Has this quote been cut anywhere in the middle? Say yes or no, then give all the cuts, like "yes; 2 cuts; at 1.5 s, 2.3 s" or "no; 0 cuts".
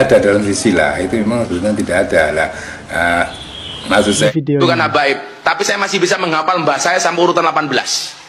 yes; 1 cut; at 4.3 s